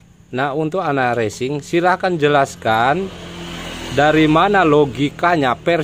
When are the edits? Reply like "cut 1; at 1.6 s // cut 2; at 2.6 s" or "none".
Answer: none